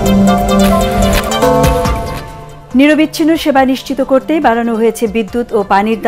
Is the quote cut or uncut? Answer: uncut